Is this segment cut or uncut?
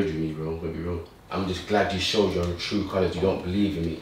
cut